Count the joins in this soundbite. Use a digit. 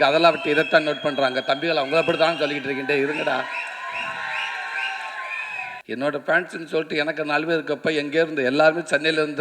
1